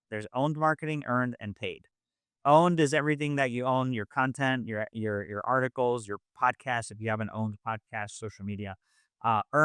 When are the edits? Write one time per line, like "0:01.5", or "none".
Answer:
none